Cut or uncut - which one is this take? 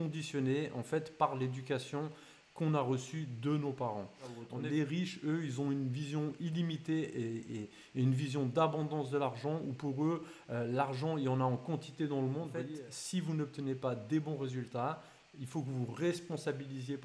cut